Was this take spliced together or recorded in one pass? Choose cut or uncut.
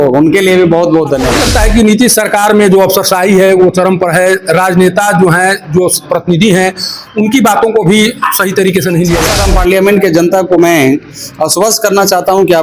cut